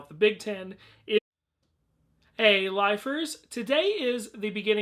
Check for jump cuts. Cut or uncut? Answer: uncut